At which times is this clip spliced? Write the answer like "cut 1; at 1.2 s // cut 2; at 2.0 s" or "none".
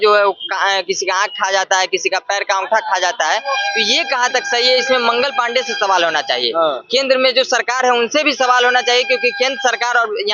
none